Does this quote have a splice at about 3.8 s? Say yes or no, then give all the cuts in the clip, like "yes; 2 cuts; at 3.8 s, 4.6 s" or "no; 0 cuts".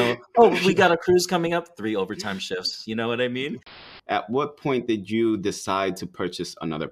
yes; 1 cut; at 3.8 s